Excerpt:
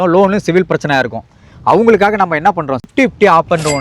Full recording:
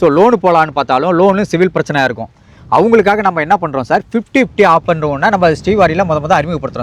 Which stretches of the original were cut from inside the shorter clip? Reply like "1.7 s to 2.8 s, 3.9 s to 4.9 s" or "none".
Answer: 3.9 s to 4.2 s